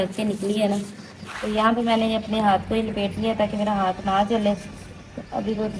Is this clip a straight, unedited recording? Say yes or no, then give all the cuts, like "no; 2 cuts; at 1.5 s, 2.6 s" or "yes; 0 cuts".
yes; 0 cuts